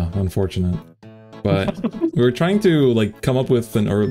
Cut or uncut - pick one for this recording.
uncut